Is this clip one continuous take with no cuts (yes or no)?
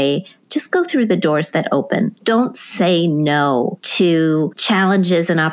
no